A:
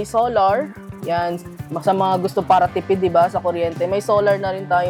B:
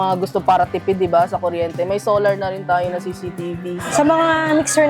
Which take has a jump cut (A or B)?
B